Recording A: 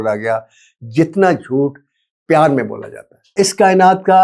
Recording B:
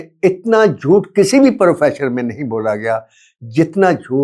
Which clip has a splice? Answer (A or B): A